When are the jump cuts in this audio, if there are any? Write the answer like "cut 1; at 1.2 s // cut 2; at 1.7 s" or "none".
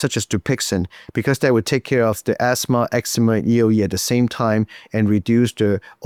none